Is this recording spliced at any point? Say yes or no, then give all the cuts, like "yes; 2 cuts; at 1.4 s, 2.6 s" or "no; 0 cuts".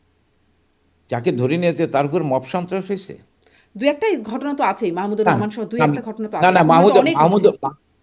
no; 0 cuts